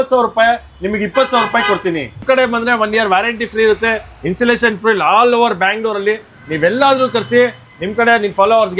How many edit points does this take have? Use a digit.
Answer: 1